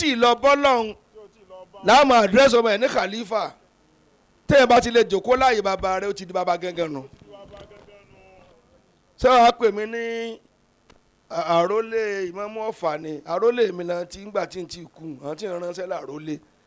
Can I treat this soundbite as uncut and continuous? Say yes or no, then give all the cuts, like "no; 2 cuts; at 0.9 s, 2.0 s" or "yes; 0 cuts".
yes; 0 cuts